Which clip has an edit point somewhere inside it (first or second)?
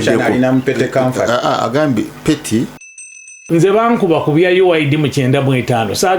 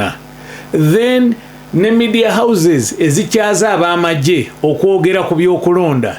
first